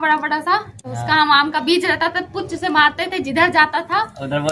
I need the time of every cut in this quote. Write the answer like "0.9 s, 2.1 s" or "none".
none